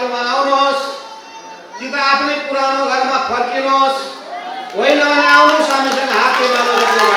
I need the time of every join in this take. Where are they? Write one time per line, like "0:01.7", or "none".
none